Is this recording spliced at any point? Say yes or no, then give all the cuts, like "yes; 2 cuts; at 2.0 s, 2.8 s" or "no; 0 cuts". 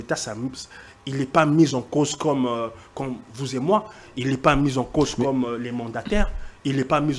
no; 0 cuts